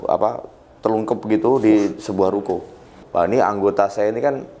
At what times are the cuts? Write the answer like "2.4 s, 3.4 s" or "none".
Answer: 3.0 s